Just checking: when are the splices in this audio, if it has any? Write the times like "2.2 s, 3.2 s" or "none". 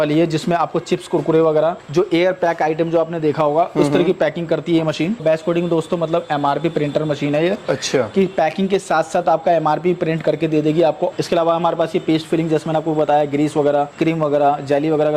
1.8 s, 5.2 s, 11.1 s, 13.9 s